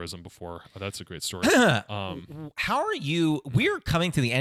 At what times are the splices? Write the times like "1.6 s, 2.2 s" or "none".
none